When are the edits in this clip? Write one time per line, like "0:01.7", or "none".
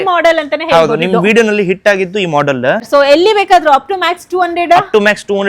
0:02.9